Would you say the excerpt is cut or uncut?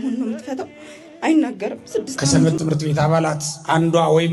cut